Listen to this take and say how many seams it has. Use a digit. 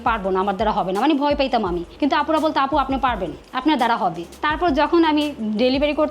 1